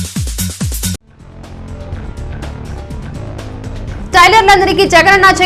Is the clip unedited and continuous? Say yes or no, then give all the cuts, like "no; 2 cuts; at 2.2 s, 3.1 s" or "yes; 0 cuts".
yes; 0 cuts